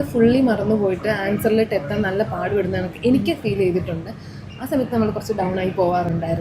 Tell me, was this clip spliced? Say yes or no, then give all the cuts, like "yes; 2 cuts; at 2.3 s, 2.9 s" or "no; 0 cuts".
no; 0 cuts